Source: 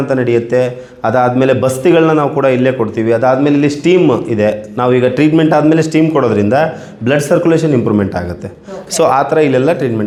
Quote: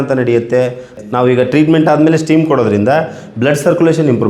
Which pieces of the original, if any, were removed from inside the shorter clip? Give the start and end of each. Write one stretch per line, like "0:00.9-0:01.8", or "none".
0:01.0-0:04.6